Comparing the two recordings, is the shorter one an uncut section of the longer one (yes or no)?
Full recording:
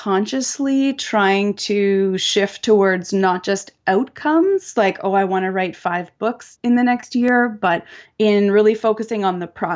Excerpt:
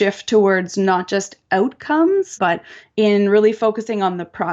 no